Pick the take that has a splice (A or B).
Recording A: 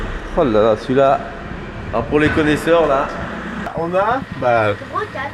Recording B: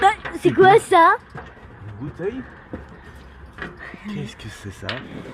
A